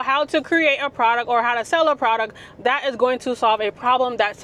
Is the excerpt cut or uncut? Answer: uncut